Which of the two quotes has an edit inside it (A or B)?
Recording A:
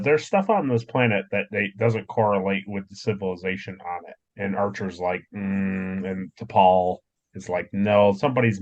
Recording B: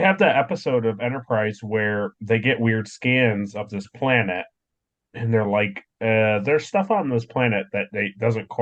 A